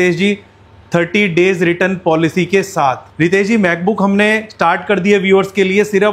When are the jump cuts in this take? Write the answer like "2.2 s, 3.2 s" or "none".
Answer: 3.1 s